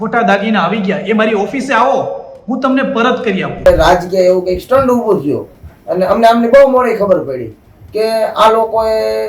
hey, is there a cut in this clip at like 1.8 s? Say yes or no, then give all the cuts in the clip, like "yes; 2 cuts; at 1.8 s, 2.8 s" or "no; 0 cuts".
no; 1 cut; at 3.7 s